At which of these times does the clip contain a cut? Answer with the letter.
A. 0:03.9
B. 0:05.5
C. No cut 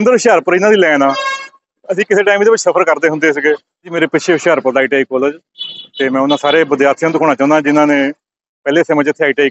A